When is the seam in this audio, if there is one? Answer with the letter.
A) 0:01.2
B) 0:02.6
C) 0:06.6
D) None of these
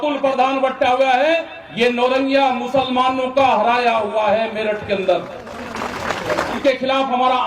C